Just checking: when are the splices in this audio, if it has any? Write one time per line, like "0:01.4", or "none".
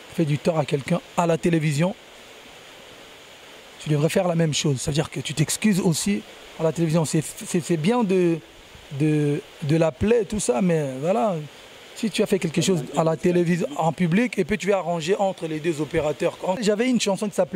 0:16.6